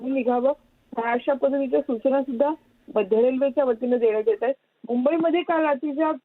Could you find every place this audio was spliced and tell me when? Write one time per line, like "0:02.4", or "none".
0:01.2